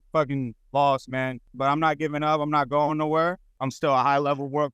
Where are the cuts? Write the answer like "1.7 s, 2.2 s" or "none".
1.5 s, 3.6 s